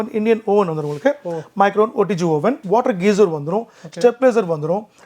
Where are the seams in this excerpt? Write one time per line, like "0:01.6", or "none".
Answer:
0:02.6